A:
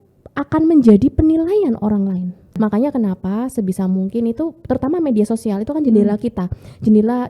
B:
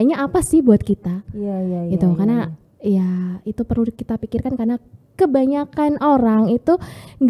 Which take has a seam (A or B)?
A